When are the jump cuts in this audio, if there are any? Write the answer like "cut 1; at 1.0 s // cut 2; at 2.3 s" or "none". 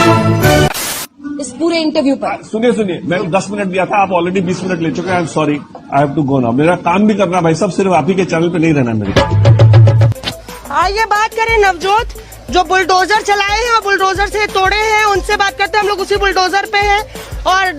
cut 1; at 1.1 s // cut 2; at 10.0 s